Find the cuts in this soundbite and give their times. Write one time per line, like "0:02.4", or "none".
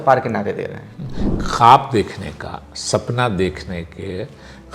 0:01.2